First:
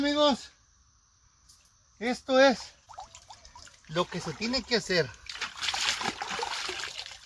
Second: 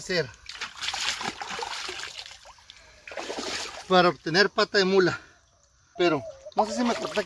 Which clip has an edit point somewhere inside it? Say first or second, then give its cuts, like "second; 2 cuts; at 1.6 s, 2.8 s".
second; 1 cut; at 5.8 s